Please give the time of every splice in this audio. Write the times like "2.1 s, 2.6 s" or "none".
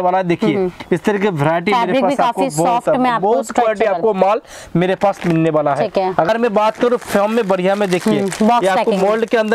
6.3 s